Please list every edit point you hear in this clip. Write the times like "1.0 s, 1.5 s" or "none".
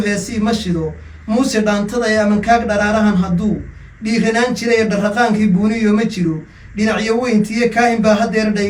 none